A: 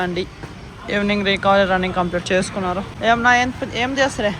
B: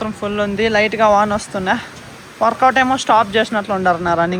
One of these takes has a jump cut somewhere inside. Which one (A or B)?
A